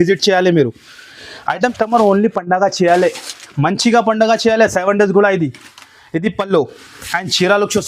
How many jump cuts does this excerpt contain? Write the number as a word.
one